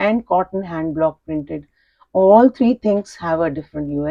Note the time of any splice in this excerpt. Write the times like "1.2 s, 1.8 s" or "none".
none